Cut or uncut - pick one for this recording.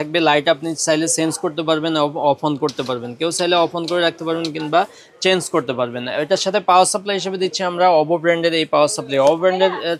uncut